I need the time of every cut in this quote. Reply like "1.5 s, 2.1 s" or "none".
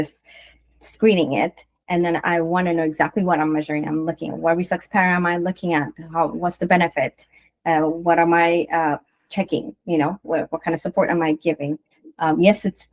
none